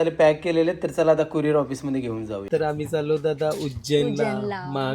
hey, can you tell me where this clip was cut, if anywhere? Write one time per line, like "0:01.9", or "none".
0:02.5